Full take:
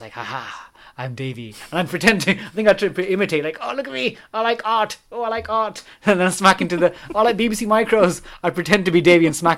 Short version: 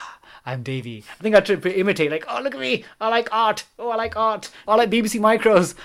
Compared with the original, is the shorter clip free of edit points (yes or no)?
no